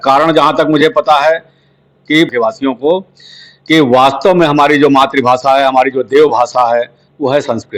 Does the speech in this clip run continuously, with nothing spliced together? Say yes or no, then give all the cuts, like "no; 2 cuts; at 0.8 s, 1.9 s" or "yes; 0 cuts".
no; 1 cut; at 2.3 s